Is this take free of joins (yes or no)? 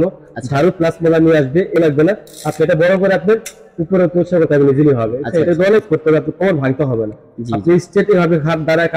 no